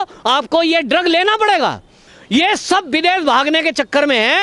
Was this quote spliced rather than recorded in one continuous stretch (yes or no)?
yes